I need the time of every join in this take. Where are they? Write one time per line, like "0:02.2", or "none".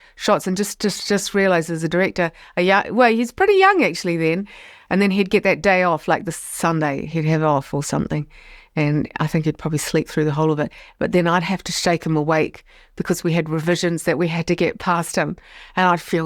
0:04.7